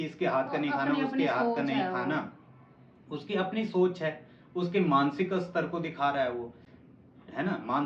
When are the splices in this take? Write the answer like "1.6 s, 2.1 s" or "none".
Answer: none